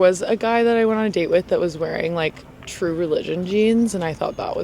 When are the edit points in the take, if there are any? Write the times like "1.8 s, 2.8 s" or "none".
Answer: none